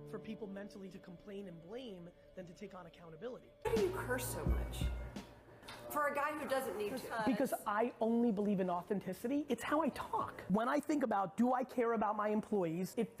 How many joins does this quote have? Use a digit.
1